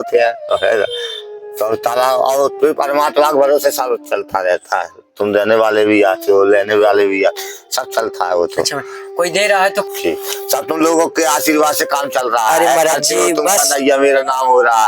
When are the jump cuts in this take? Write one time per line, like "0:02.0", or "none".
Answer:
0:09.9